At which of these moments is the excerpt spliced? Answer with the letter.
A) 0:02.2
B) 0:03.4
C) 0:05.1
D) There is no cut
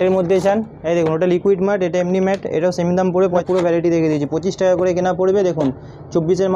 B